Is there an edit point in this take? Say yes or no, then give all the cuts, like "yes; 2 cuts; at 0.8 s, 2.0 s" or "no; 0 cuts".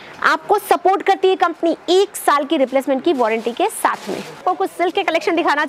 yes; 1 cut; at 4.4 s